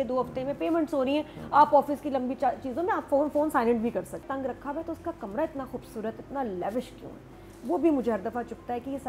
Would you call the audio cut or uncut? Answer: cut